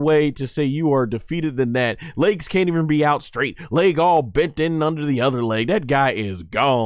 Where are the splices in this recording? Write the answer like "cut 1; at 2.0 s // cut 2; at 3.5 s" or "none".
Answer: none